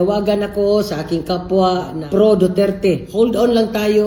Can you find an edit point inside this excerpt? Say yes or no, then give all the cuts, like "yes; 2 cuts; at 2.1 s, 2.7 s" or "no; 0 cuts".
yes; 1 cut; at 3.1 s